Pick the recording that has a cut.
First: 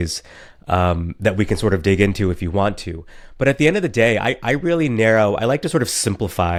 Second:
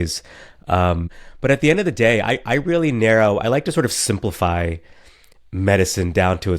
second; 1 cut; at 1.1 s

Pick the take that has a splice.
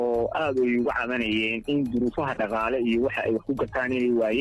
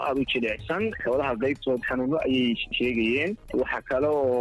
second; 2 cuts; at 2.7 s, 3.4 s

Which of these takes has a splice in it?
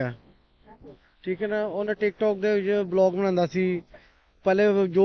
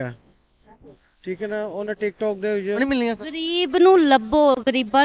second; 1 cut; at 2.8 s

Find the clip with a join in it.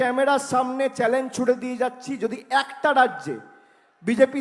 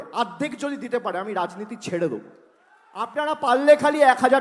second; 1 cut; at 3.1 s

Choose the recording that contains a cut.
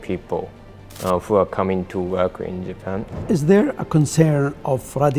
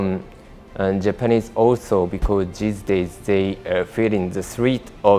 first; 1 cut; at 3.1 s

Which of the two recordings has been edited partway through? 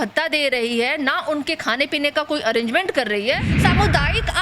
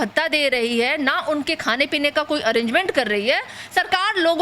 first; 1 cut; at 3.5 s

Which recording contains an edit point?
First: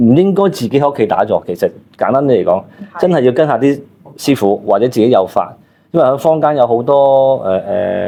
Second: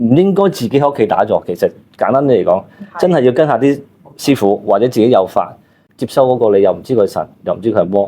second; 1 cut; at 5.8 s

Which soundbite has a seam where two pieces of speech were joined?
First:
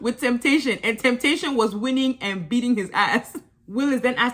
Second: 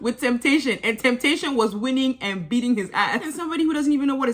second; 1 cut; at 3.4 s

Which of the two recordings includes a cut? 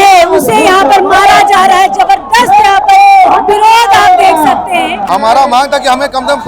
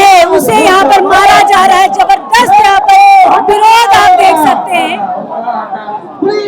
first; 1 cut; at 5.0 s

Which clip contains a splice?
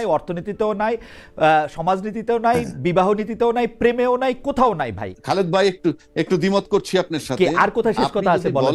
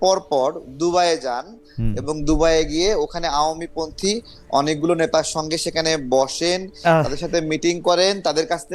first; 1 cut; at 5.1 s

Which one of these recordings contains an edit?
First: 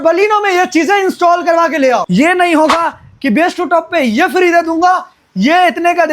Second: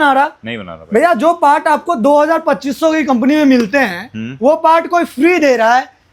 first; 1 cut; at 2.1 s

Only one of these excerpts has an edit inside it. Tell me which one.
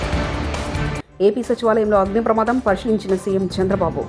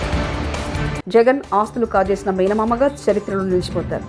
first; 1 cut; at 1.0 s

